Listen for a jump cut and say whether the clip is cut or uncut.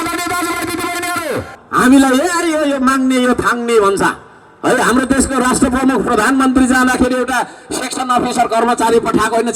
cut